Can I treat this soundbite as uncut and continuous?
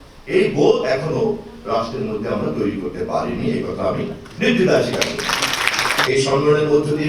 no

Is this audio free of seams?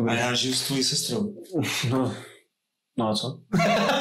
yes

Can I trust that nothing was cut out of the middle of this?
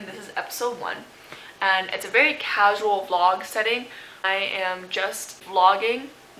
yes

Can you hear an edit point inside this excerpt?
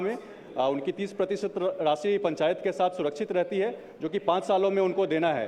no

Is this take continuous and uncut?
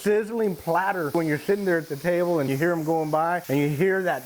no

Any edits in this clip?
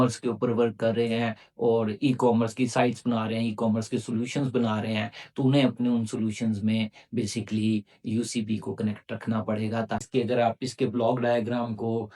yes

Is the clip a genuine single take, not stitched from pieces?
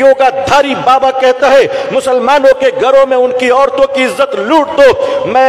yes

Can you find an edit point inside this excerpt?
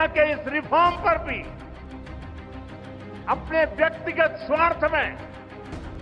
yes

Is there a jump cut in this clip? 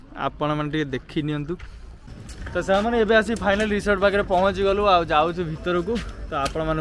yes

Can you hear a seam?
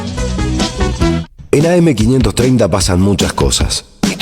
yes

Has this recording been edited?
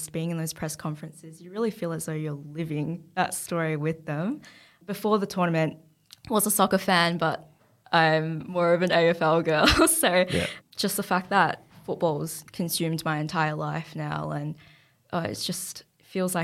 yes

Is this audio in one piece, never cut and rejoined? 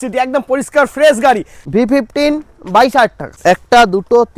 no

